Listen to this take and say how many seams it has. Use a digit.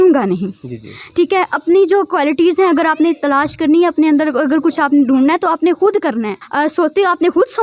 1